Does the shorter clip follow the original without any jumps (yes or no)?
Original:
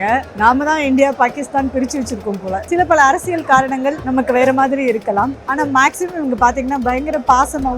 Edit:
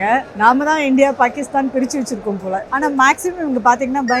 no